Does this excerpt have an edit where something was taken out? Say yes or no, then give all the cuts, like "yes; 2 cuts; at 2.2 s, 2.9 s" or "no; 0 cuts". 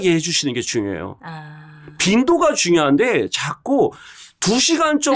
no; 0 cuts